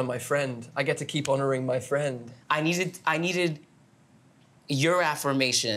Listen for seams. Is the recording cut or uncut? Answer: cut